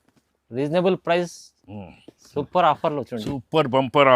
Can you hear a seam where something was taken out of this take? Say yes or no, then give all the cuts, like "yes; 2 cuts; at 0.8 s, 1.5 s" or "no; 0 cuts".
no; 0 cuts